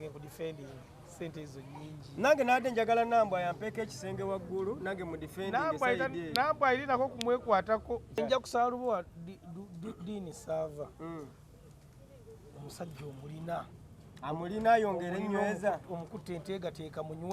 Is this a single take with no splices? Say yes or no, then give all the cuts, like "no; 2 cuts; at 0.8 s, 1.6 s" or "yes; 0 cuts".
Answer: no; 1 cut; at 8.2 s